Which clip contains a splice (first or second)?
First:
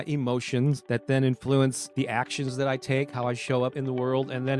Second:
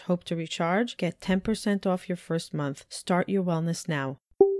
first